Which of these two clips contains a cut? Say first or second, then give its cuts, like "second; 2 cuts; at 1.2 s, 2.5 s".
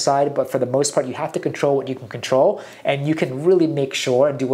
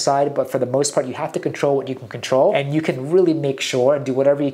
second; 1 cut; at 2.5 s